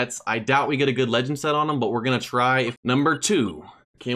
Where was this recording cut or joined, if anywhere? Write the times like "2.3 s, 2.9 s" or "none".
2.7 s